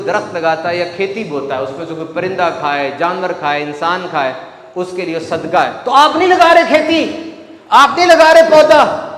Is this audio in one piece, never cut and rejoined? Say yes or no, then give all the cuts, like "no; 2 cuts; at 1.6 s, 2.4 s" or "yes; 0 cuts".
yes; 0 cuts